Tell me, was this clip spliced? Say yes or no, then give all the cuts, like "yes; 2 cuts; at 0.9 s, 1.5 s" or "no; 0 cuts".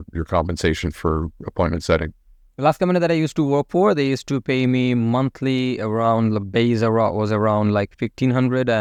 no; 0 cuts